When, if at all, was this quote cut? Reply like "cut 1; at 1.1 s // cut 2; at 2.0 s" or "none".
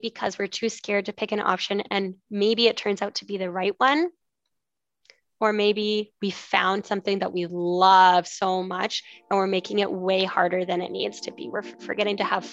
none